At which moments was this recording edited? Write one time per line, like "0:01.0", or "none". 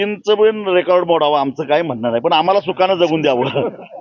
none